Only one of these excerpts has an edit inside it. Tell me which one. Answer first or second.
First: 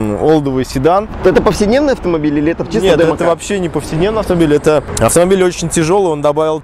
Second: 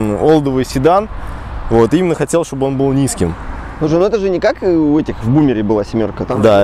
first